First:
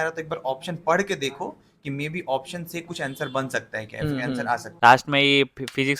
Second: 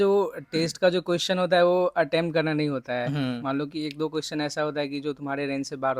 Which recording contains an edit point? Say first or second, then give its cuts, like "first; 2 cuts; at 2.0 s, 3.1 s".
first; 1 cut; at 4.8 s